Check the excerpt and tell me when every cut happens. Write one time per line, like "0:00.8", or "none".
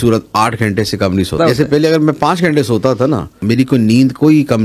0:01.4
0:03.4